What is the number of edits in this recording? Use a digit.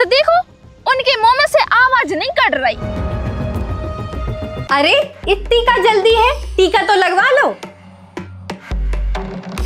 1